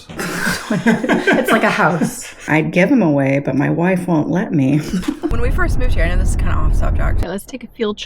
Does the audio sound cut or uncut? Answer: cut